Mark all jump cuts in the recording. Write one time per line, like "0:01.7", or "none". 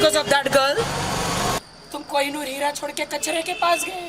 0:01.6